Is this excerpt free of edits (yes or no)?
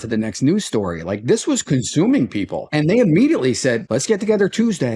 no